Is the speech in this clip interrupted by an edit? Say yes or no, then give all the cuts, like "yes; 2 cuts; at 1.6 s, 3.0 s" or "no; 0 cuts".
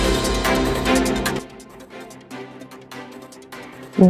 no; 0 cuts